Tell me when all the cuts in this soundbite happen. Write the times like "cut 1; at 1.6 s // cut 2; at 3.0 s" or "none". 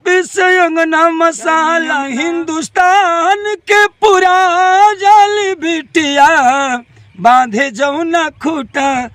cut 1; at 1.9 s